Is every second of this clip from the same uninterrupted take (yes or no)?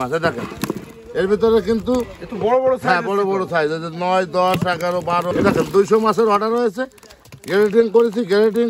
no